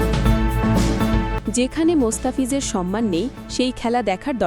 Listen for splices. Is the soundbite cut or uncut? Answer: cut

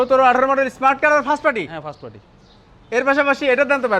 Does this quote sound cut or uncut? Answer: uncut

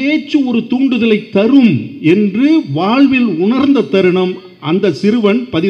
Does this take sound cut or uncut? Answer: uncut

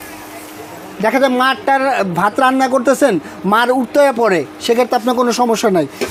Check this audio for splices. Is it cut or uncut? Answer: uncut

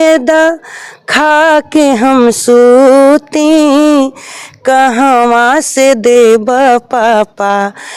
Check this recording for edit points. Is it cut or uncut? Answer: uncut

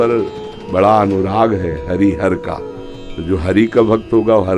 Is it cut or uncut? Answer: uncut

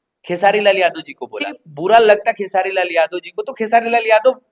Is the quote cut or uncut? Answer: cut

